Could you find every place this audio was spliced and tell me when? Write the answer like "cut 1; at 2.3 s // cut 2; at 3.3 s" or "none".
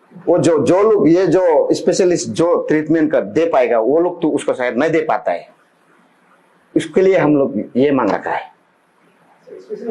none